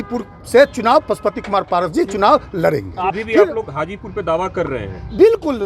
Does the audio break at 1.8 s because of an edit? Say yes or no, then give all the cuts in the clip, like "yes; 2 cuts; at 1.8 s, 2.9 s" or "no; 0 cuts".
no; 1 cut; at 3.1 s